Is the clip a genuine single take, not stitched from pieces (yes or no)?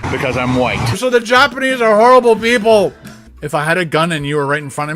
no